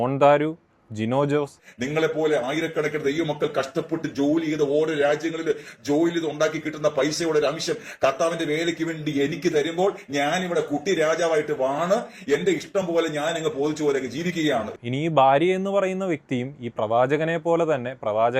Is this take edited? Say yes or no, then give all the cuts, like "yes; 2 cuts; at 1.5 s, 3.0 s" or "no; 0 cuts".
yes; 2 cuts; at 1.6 s, 14.7 s